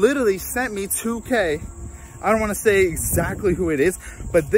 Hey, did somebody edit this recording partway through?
no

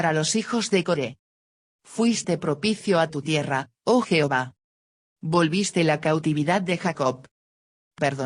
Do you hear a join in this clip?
yes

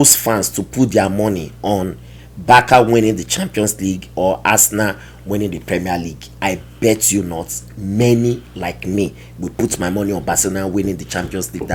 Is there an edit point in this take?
no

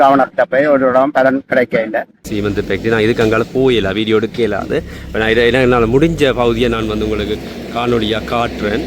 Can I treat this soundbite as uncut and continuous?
no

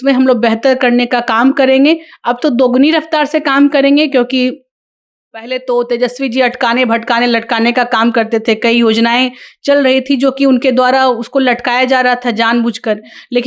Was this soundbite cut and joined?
no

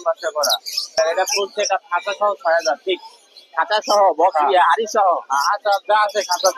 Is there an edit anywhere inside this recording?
yes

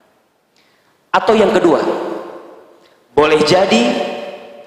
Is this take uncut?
yes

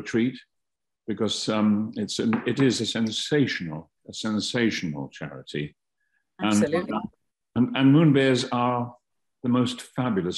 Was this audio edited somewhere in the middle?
no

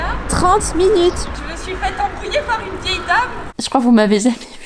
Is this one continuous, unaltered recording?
no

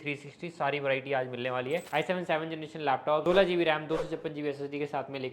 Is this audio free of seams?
no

